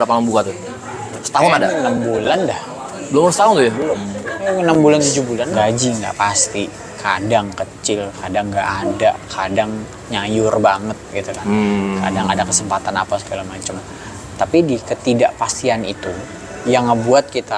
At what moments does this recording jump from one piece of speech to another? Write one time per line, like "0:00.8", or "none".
0:05.5